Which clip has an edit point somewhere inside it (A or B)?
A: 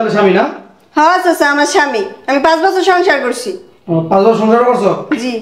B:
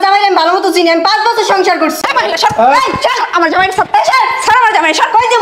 B